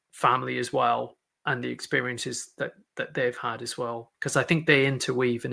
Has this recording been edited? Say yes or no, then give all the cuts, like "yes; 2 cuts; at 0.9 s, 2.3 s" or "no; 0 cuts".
yes; 1 cut; at 4.1 s